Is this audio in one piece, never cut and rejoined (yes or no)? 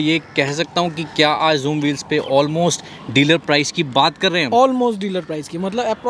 yes